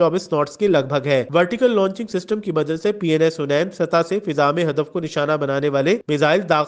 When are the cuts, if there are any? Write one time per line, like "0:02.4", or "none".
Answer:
0:01.3